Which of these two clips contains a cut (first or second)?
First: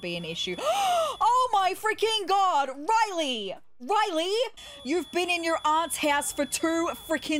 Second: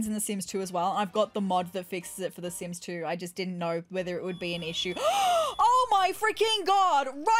first